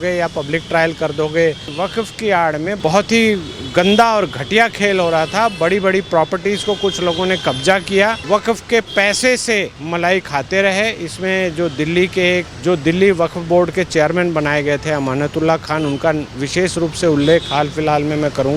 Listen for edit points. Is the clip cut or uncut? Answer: cut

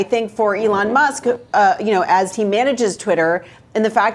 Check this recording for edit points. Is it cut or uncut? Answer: uncut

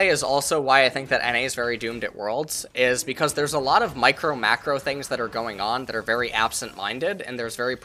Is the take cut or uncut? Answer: uncut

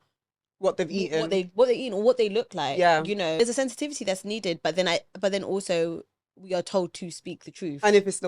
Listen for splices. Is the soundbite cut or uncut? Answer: cut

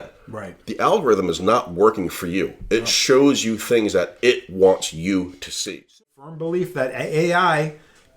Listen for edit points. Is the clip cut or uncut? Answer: cut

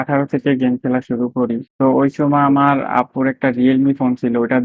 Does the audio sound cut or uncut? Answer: uncut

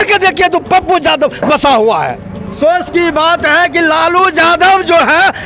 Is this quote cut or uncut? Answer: cut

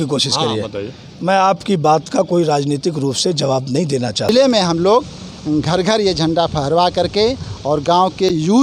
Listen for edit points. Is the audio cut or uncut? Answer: cut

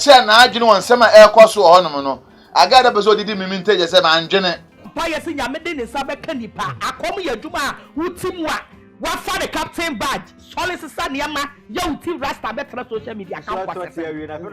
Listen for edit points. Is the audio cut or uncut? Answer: cut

